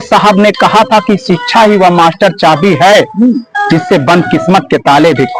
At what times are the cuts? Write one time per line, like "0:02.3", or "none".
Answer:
none